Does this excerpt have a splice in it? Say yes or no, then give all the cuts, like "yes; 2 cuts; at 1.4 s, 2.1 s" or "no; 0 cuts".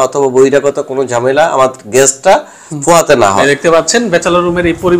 yes; 1 cut; at 3.4 s